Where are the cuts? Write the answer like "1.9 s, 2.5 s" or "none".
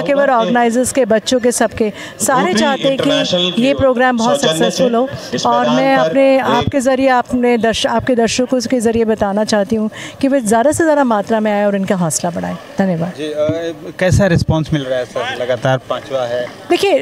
none